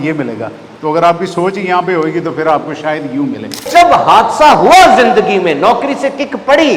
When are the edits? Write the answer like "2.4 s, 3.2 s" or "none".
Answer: 3.7 s